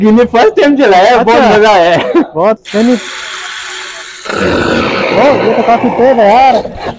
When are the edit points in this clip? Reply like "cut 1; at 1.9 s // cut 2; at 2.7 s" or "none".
cut 1; at 2.6 s